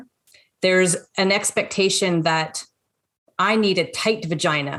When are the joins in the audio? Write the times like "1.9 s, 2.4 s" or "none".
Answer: none